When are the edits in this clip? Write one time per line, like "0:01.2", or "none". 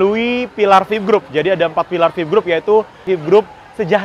0:03.0